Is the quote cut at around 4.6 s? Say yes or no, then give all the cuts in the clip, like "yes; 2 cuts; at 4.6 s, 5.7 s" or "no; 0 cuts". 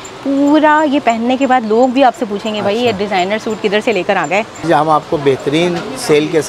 yes; 1 cut; at 4.6 s